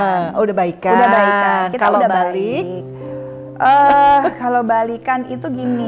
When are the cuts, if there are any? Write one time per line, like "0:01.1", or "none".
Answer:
none